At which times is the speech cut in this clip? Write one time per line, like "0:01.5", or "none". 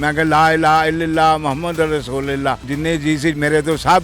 0:02.7